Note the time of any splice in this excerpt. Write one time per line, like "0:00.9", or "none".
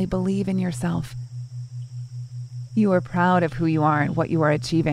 none